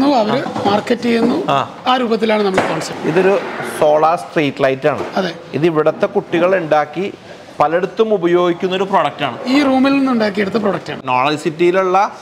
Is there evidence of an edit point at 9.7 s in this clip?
no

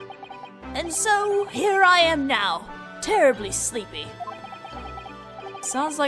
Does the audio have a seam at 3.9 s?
no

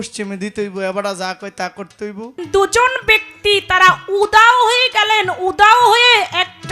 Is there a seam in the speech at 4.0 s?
no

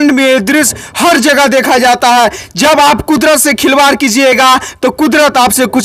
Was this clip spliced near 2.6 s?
no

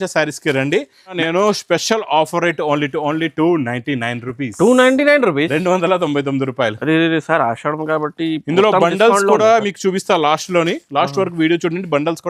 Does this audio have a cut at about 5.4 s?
no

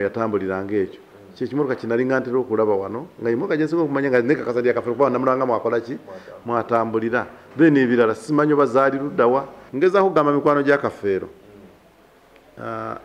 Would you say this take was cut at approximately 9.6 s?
yes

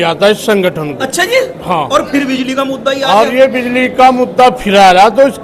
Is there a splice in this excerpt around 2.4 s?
no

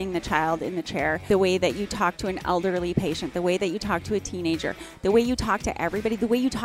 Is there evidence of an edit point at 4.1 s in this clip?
no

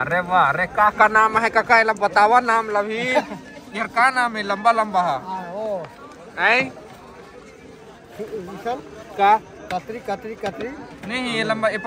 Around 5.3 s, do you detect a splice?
no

